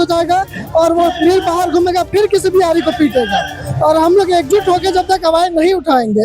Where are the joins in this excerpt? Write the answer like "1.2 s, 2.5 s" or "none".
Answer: none